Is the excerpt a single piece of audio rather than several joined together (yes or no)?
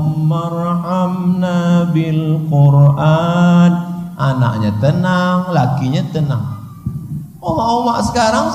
yes